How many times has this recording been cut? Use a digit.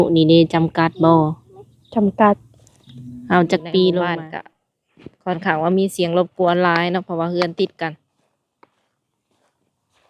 1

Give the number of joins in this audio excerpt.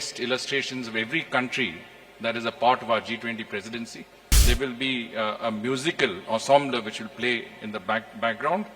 1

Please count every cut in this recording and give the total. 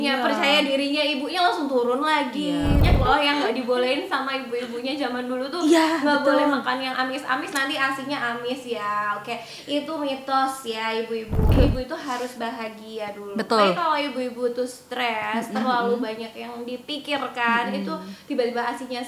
2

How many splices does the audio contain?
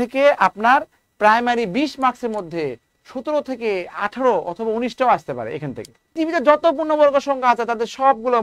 1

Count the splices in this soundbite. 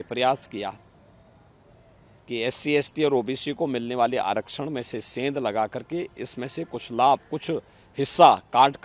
0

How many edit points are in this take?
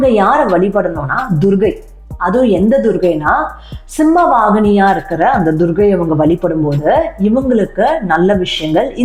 0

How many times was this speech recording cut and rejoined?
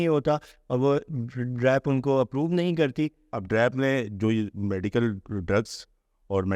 1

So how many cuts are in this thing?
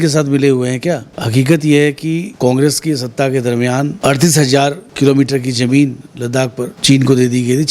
5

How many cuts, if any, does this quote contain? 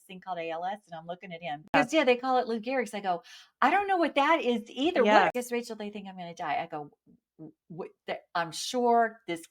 2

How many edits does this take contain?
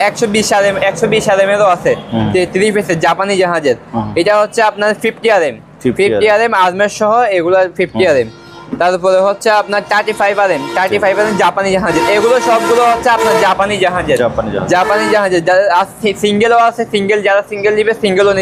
0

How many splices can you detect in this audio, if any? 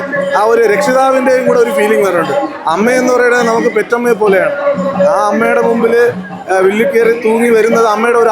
0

